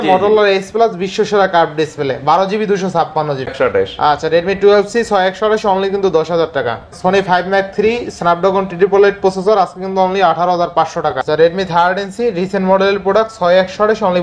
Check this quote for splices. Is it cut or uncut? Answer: cut